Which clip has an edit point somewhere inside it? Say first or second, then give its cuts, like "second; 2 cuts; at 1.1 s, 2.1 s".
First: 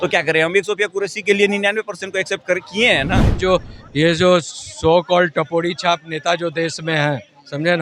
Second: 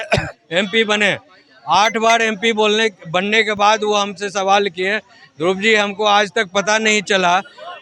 first; 1 cut; at 3.4 s